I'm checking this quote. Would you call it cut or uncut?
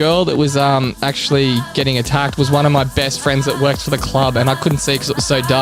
uncut